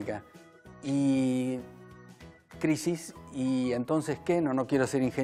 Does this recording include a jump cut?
no; 0 cuts

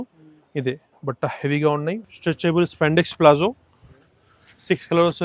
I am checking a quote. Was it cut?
yes; 1 cut; at 2.0 s

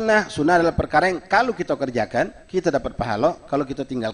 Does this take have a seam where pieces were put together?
no; 0 cuts

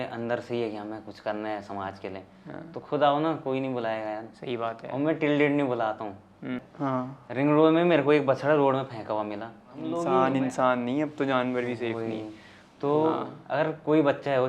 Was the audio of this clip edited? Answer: yes; 3 cuts; at 6.6 s, 9.8 s, 13.3 s

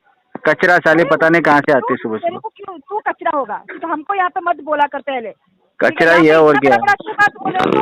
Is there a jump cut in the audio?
no; 0 cuts

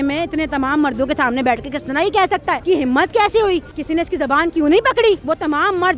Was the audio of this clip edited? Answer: yes; 3 cuts; at 2.6 s, 3.7 s, 5.2 s

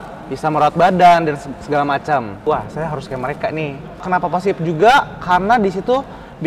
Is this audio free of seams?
no; 2 cuts; at 2.4 s, 4.0 s

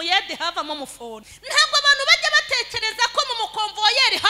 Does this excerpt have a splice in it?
yes; 1 cut; at 1.3 s

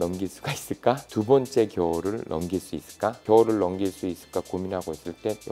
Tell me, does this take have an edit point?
no; 0 cuts

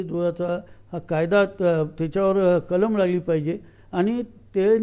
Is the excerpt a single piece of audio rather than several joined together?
yes; 0 cuts

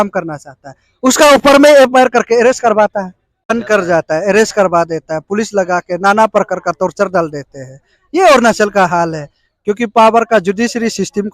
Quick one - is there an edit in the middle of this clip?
yes; 1 cut; at 3.5 s

